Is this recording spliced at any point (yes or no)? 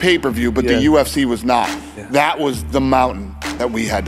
no